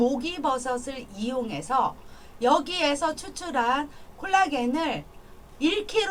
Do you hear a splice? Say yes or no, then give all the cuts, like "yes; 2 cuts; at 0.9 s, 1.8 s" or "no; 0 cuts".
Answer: no; 0 cuts